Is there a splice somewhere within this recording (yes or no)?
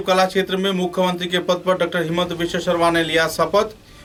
no